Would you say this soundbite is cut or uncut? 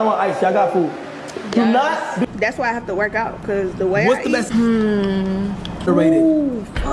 cut